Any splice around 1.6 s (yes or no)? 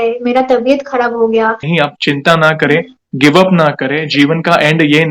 yes